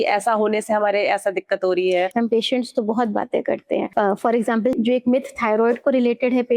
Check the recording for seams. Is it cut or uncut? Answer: cut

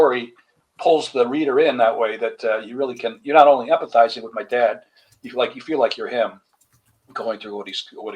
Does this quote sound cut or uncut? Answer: uncut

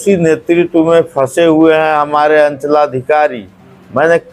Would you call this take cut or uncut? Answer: uncut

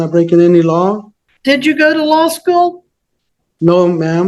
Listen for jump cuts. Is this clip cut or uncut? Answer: cut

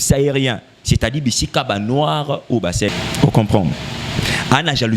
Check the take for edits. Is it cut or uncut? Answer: cut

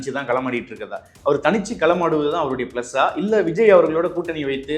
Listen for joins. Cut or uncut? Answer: uncut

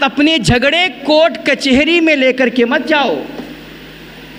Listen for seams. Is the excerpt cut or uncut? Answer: uncut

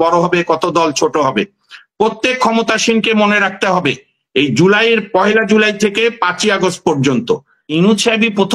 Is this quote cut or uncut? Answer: cut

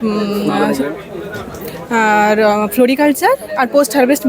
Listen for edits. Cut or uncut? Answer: uncut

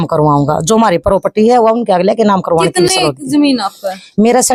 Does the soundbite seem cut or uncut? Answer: uncut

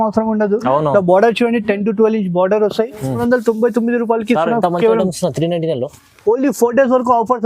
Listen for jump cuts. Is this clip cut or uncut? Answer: cut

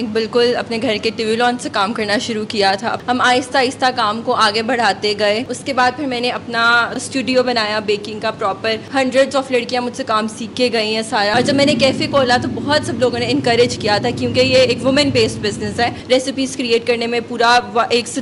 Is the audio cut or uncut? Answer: cut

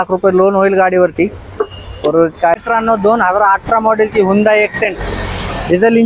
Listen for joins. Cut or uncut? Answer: cut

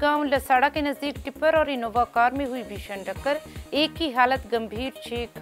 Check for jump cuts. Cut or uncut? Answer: uncut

